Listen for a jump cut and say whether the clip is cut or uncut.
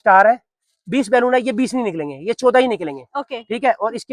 uncut